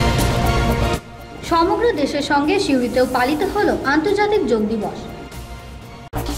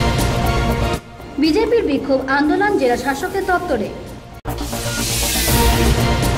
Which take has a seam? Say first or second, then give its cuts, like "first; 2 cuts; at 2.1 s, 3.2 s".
second; 1 cut; at 1.0 s